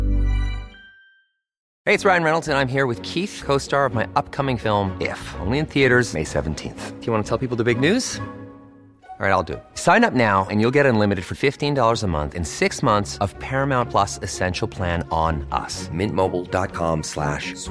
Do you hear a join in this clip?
yes; 1 cut; at 1.6 s

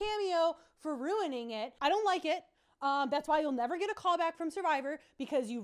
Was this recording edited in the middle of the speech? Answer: yes; 1 cut; at 1.7 s

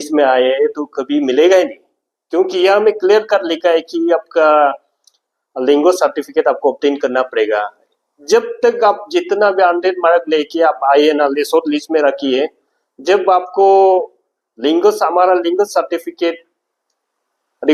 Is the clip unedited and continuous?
yes; 0 cuts

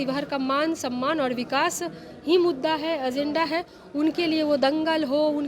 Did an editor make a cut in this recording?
no; 0 cuts

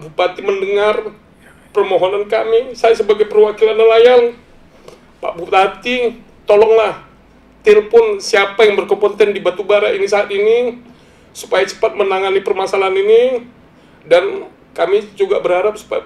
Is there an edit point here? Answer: no; 0 cuts

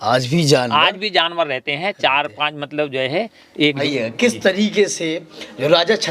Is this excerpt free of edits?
no; 1 cut; at 3.8 s

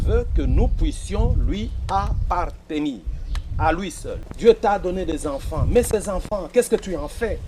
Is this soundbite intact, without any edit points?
no; 1 cut; at 4.2 s

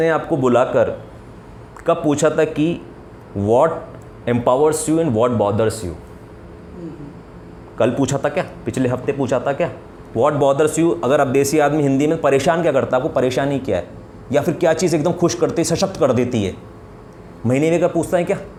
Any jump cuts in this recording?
no; 0 cuts

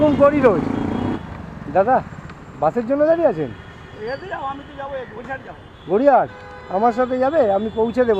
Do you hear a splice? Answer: yes; 1 cut; at 0.9 s

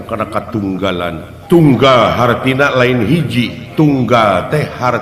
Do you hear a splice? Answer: yes; 2 cuts; at 1.3 s, 3.6 s

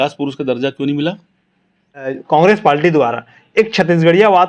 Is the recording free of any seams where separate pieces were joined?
no; 1 cut; at 2.2 s

